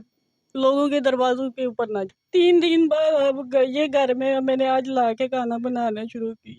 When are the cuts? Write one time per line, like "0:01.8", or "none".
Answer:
0:02.2